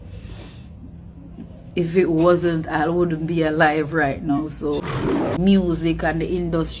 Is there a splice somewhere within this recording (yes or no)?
yes